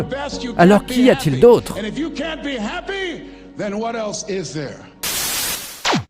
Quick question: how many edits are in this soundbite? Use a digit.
1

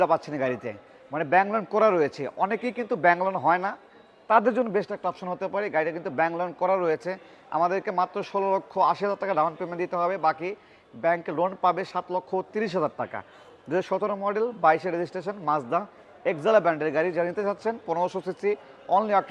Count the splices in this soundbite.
0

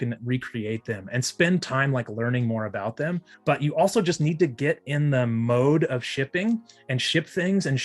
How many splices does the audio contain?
1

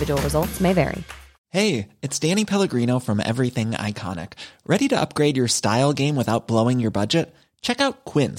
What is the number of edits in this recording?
1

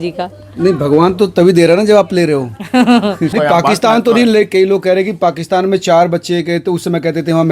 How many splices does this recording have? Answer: 1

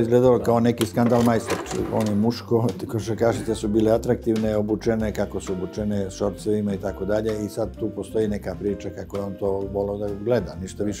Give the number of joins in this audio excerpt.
1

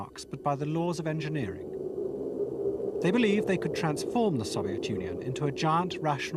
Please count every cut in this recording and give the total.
1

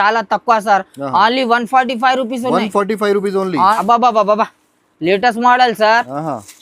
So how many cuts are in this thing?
1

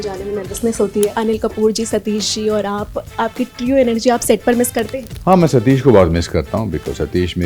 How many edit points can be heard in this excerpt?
2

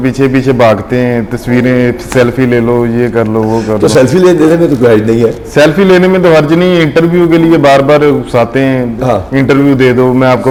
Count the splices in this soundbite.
0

